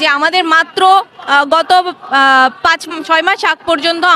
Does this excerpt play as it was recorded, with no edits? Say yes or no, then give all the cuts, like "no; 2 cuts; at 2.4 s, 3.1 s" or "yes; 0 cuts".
yes; 0 cuts